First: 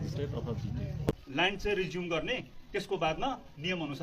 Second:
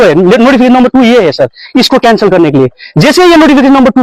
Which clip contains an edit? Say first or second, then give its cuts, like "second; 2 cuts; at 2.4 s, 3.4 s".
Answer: first; 1 cut; at 1.1 s